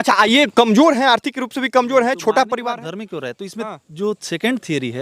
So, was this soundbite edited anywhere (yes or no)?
no